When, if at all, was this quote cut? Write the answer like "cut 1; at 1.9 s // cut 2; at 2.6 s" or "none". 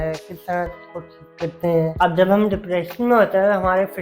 cut 1; at 1.9 s